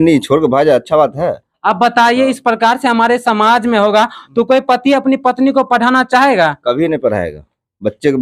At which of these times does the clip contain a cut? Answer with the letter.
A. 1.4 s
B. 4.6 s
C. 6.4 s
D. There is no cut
D